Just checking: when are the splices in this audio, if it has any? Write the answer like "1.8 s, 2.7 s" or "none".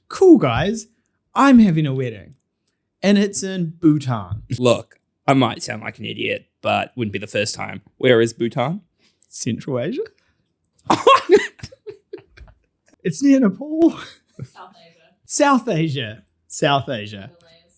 4.4 s